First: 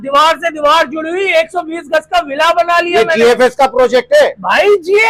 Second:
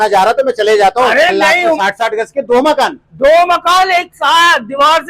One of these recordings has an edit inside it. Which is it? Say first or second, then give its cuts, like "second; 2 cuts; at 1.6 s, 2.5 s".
second; 1 cut; at 1.8 s